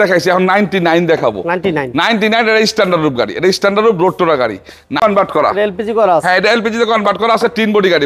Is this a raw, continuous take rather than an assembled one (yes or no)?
no